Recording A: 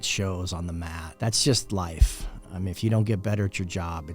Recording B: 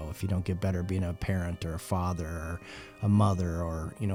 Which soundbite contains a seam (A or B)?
A